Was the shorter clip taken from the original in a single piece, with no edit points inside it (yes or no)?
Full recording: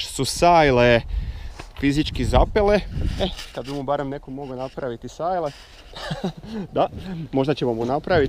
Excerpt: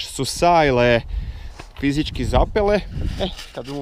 yes